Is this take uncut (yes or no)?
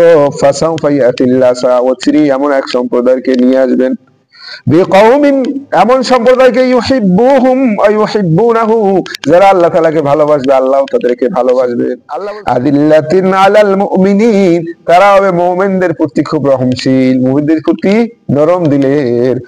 no